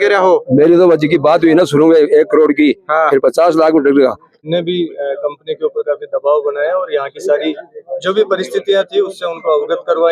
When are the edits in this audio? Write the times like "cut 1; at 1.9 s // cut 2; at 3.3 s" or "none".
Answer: cut 1; at 4.3 s